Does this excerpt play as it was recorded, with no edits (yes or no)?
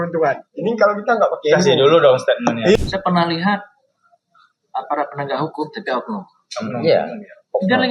no